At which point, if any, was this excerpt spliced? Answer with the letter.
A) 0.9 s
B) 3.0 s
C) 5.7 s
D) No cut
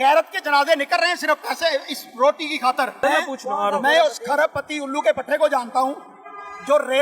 B